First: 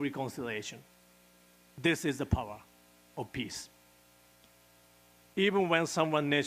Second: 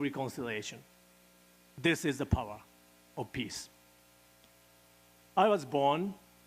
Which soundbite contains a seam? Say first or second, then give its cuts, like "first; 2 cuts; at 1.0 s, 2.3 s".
first; 1 cut; at 5.2 s